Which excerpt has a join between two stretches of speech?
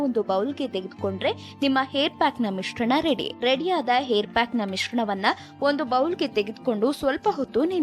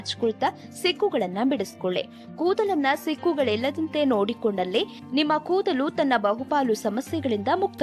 first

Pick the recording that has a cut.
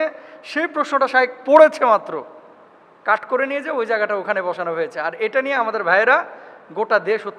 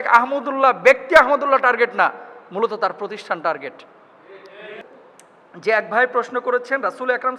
second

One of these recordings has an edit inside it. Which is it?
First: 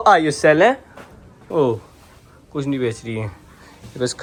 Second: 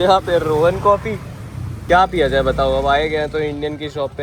second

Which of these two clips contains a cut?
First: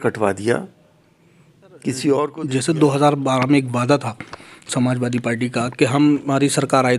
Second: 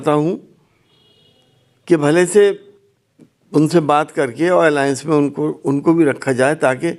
first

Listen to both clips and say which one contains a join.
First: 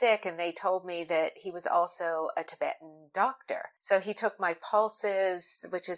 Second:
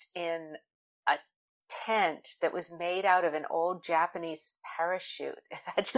first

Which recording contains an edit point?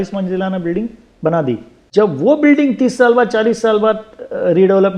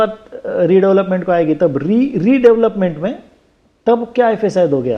first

